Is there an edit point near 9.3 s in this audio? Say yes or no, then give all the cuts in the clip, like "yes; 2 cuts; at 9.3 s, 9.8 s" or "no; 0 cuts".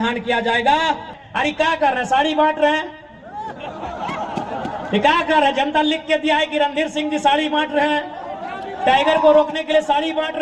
no; 1 cut; at 1.1 s